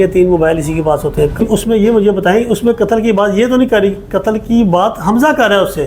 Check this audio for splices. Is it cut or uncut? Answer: cut